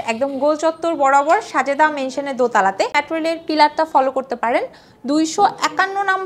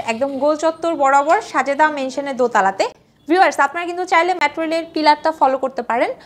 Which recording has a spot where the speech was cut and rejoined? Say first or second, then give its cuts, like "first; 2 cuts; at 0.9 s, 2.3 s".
first; 1 cut; at 3.0 s